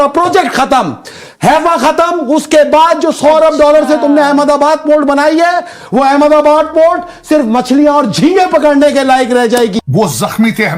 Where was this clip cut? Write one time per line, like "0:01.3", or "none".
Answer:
0:09.8